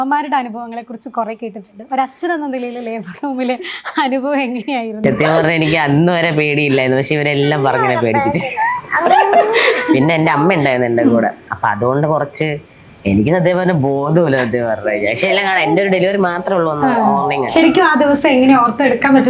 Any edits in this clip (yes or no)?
no